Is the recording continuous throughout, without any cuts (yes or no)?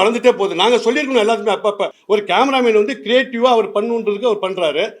no